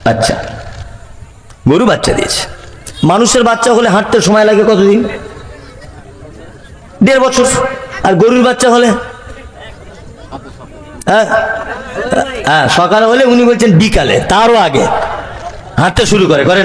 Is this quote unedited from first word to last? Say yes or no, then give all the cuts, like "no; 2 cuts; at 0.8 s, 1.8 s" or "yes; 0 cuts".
yes; 0 cuts